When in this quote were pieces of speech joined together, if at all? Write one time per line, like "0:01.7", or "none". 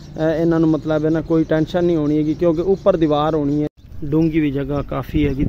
0:03.7

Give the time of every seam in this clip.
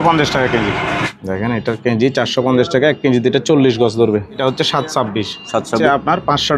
0:01.1
0:04.4
0:05.8

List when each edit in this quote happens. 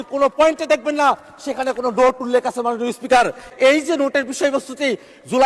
0:03.5

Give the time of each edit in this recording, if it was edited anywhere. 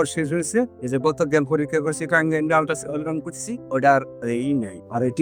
none

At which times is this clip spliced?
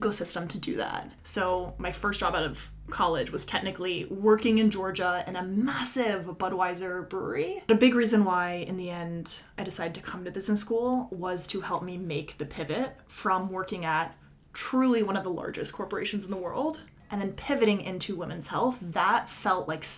0:01.1
0:07.7
0:16.9

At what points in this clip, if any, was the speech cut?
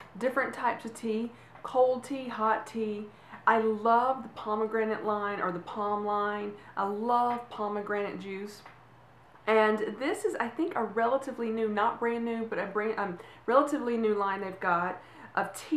0:02.5

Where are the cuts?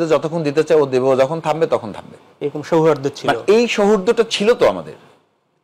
none

